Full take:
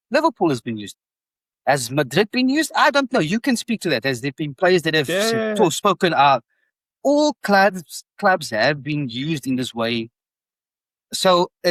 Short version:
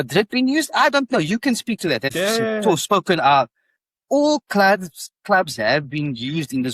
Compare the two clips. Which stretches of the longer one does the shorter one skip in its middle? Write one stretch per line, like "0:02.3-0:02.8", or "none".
0:04.1-0:05.1